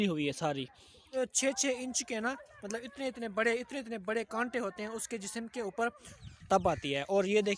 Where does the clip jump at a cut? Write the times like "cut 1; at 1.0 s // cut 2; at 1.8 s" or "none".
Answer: cut 1; at 1.1 s // cut 2; at 6.2 s